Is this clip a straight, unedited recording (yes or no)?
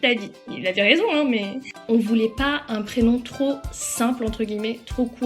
no